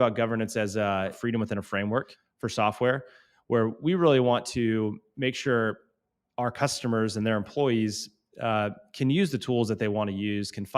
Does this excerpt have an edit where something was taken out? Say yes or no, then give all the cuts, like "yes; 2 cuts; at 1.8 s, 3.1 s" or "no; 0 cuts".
yes; 2 cuts; at 1.2 s, 2.2 s